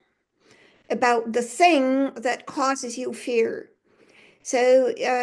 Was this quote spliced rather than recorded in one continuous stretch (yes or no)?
no